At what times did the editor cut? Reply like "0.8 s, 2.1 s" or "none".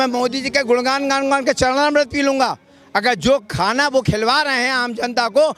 none